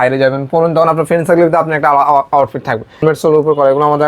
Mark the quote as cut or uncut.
cut